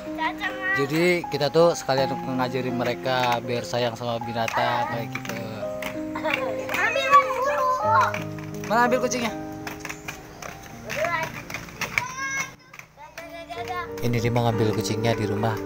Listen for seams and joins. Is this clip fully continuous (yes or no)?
yes